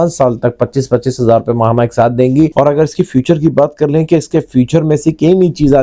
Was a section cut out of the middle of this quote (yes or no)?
yes